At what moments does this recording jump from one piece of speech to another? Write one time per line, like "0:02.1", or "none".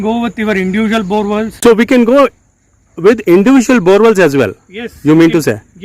0:01.6